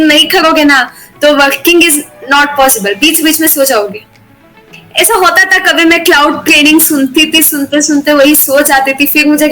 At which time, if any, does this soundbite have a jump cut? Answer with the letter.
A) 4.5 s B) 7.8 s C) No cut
C